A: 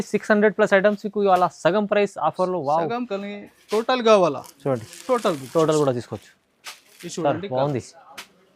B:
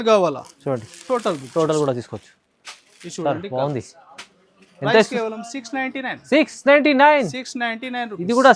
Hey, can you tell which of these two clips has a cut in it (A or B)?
A